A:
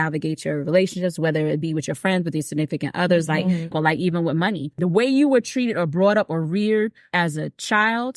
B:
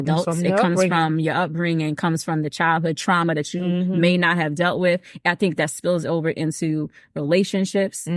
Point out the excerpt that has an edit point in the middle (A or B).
A